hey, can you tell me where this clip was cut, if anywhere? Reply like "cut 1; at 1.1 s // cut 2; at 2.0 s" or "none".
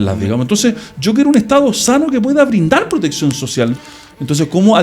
cut 1; at 3.8 s